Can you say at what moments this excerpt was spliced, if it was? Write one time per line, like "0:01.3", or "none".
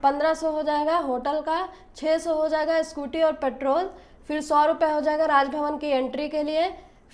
none